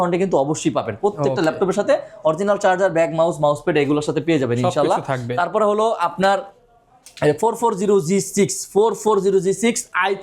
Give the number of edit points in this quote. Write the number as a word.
zero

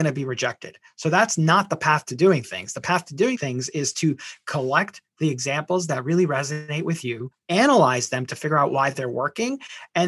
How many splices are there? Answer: two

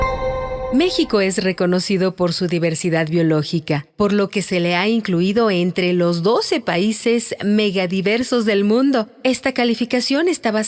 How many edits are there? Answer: one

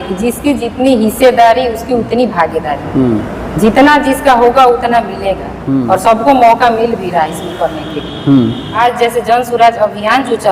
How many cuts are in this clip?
one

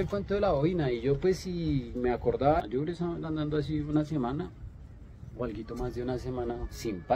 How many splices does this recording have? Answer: one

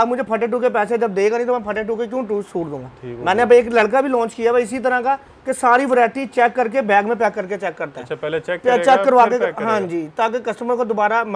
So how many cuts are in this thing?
zero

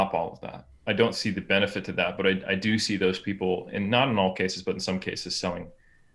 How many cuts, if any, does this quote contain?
zero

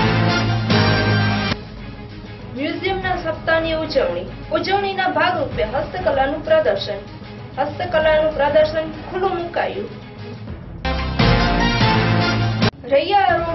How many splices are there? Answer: zero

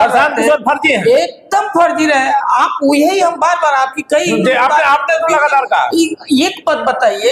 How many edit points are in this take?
zero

